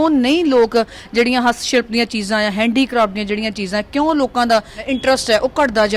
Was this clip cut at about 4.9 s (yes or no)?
yes